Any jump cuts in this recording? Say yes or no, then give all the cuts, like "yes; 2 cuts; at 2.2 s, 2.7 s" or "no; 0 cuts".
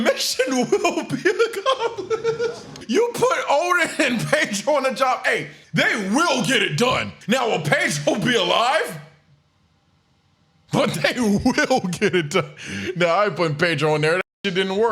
yes; 2 cuts; at 2.7 s, 5.5 s